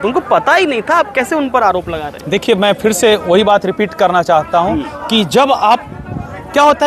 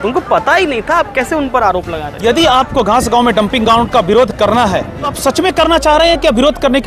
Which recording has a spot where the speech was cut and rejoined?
second; 2 cuts; at 2.0 s, 5.1 s

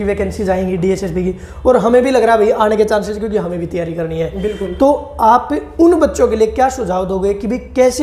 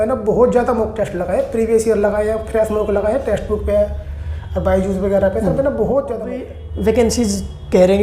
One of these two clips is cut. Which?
second; 1 cut; at 6.4 s

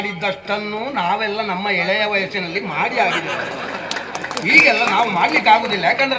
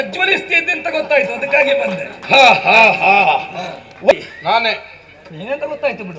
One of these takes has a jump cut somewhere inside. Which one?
second; 1 cut; at 4.1 s

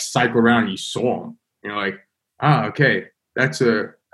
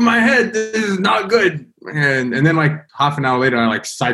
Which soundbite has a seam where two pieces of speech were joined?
second; 1 cut; at 2.8 s

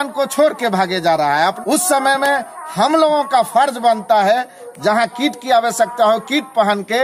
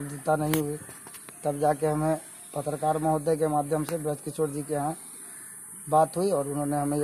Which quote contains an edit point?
first; 2 cuts; at 1.6 s, 4.6 s

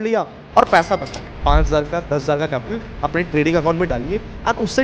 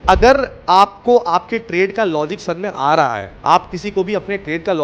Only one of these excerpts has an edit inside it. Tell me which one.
first; 1 cut; at 1.3 s

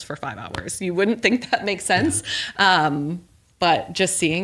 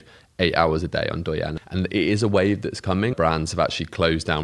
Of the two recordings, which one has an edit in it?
second; 2 cuts; at 1.6 s, 3.1 s

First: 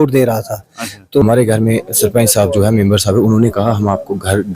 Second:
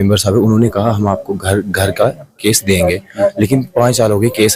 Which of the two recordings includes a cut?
first; 1 cut; at 1.2 s

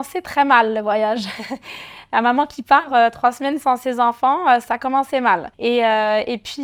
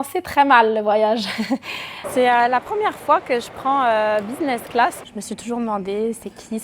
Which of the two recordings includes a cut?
second; 2 cuts; at 2.0 s, 5.0 s

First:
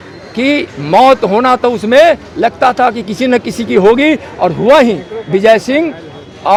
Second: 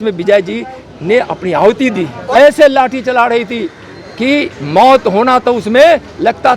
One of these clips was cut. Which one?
second; 1 cut; at 2.2 s

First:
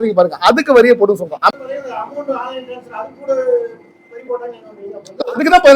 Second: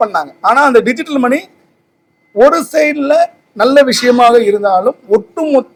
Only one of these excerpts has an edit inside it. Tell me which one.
first; 1 cut; at 1.4 s

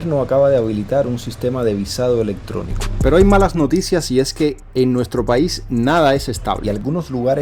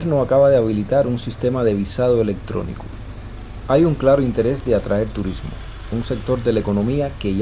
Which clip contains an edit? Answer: first; 2 cuts; at 2.8 s, 6.4 s

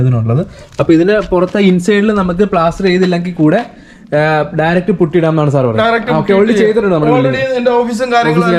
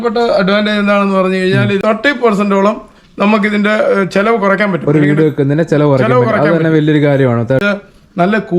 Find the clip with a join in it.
second; 2 cuts; at 1.8 s, 7.6 s

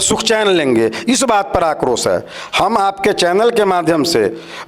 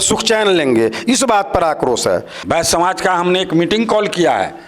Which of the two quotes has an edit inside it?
second; 1 cut; at 2.3 s

